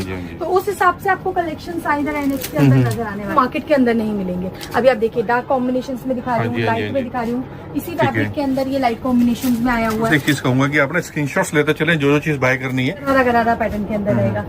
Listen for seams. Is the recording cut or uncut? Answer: cut